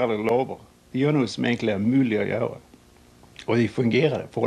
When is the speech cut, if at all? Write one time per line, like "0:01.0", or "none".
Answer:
none